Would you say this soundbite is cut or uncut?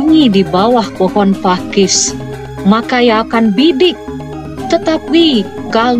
uncut